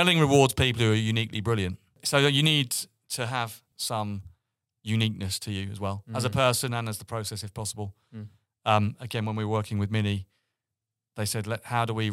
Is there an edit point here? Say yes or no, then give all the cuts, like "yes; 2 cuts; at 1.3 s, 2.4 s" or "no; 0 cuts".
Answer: yes; 2 cuts; at 2.0 s, 3.7 s